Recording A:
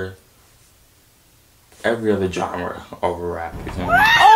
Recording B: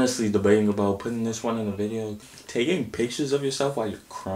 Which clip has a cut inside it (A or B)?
B